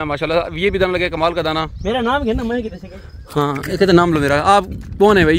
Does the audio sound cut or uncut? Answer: uncut